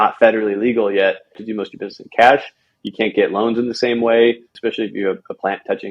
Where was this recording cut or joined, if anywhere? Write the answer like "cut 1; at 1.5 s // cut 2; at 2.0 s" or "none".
cut 1; at 1.4 s // cut 2; at 4.5 s